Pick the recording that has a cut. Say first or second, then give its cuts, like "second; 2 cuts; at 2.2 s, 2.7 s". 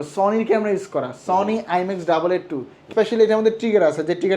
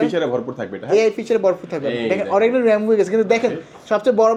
first; 1 cut; at 2.9 s